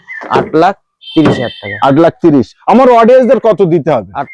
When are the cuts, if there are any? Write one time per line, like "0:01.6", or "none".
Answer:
none